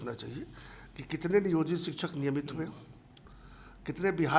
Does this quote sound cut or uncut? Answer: uncut